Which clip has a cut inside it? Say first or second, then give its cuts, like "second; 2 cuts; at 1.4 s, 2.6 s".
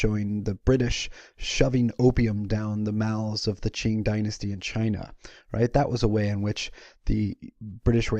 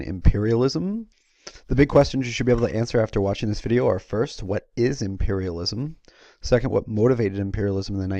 second; 1 cut; at 5.5 s